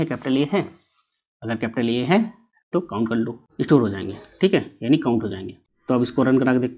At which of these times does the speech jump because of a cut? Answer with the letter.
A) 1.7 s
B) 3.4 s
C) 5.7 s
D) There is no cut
B